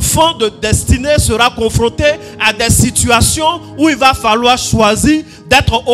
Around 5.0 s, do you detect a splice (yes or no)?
no